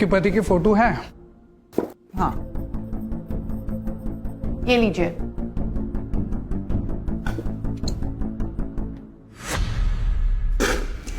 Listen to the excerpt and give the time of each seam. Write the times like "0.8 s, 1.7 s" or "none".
none